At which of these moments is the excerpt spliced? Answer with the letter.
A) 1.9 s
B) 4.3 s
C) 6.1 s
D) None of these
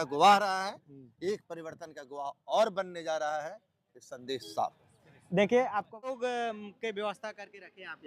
C